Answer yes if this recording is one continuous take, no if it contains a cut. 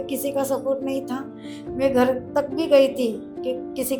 yes